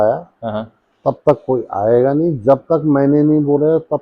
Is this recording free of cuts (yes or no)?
yes